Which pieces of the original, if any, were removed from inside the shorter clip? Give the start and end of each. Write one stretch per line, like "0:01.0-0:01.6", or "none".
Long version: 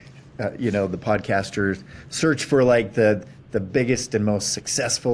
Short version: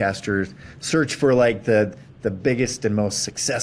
none